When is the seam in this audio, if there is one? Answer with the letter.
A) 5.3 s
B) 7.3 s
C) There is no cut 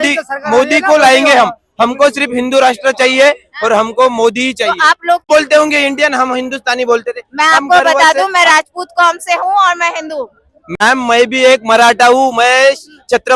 A